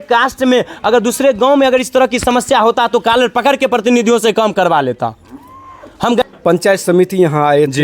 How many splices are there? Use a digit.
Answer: 1